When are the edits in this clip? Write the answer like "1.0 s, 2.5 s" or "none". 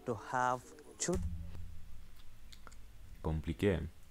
1.5 s